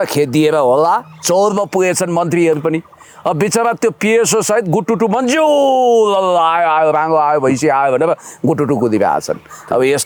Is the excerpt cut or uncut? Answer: uncut